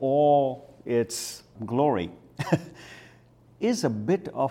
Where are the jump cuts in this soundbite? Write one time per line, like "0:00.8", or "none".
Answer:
0:01.5